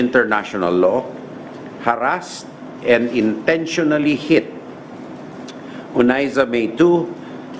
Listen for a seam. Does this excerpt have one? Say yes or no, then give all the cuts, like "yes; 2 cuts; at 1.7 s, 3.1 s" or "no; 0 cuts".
no; 0 cuts